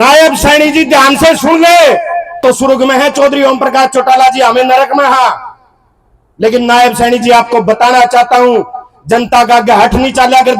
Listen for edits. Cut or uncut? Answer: cut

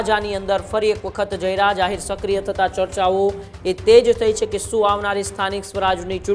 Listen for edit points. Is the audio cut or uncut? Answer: uncut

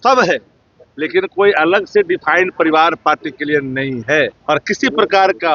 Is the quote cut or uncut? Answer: cut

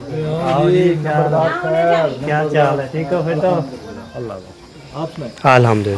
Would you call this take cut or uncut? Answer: uncut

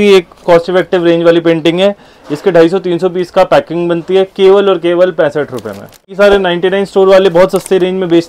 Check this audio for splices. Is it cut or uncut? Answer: cut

